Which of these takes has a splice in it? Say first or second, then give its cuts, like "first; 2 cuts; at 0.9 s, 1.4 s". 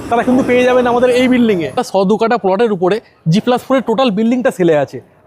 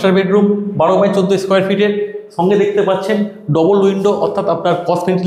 first; 1 cut; at 1.8 s